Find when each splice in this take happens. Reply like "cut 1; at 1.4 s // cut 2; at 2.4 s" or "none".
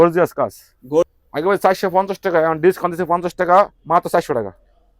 cut 1; at 1.1 s